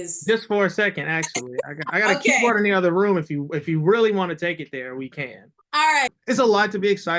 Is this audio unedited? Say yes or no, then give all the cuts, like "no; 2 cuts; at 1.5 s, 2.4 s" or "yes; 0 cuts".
no; 1 cut; at 6.1 s